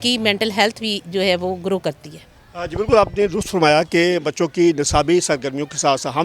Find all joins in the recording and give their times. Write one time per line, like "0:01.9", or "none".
none